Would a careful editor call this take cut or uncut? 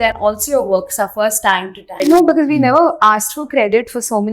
cut